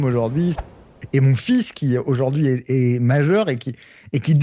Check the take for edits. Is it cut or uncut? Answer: cut